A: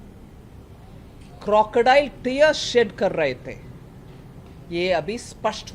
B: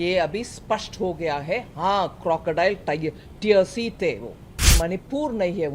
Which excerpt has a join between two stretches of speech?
B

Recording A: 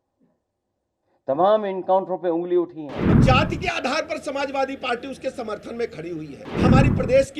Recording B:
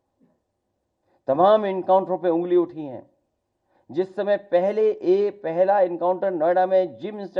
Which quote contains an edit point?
A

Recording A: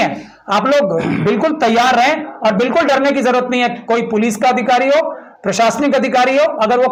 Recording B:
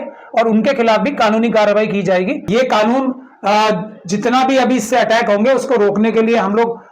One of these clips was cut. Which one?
B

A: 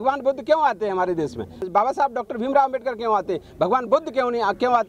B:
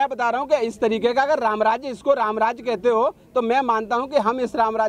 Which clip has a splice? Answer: A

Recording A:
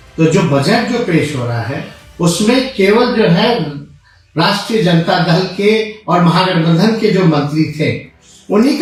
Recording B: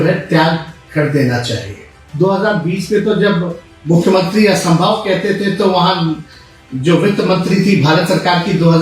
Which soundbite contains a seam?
B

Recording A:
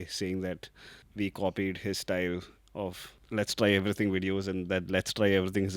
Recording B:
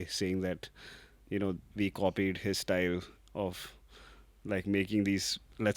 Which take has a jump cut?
A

